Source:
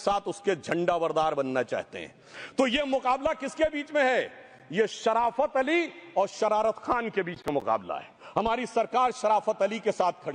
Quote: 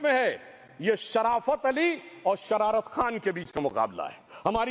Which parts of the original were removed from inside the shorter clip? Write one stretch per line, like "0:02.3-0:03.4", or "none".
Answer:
none